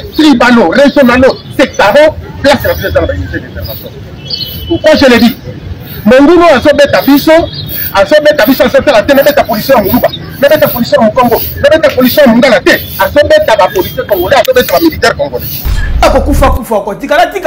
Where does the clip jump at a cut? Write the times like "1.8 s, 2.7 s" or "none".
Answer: 16.0 s